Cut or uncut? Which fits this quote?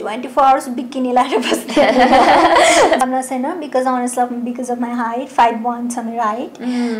cut